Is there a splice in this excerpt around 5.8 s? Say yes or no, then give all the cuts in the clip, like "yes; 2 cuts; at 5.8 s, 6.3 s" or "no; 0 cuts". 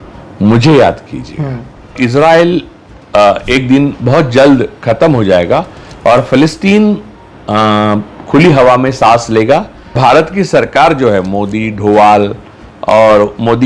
no; 2 cuts; at 1.9 s, 9.8 s